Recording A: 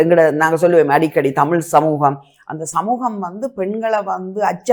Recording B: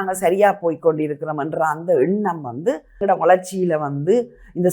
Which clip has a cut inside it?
B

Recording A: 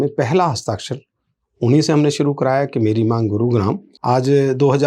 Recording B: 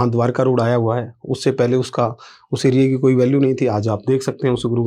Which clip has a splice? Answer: A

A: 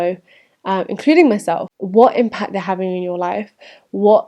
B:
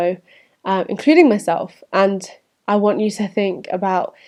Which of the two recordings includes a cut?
A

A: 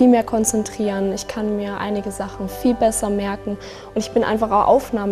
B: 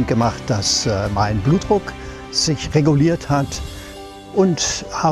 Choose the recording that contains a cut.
B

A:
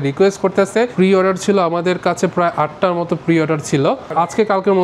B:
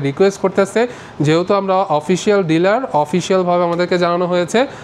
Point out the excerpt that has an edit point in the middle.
A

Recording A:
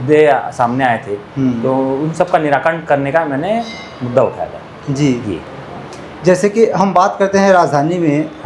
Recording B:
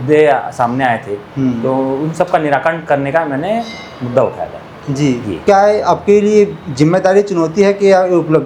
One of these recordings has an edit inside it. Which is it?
B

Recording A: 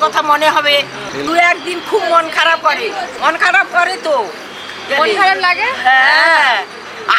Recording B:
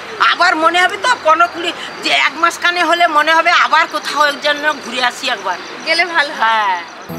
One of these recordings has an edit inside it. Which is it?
A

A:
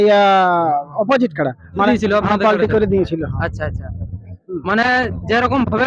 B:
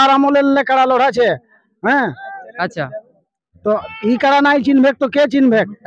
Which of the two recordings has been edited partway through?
A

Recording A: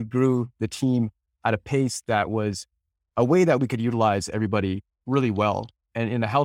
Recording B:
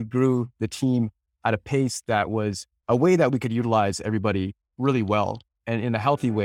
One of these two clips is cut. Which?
B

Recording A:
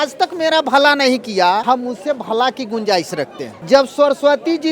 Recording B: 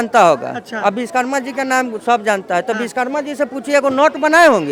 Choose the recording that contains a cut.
A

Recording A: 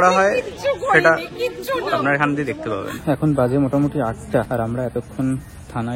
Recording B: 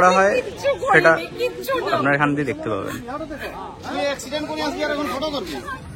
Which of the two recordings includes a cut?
A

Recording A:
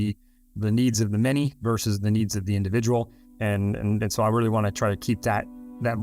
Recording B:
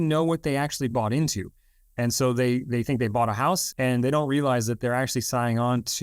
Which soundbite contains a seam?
B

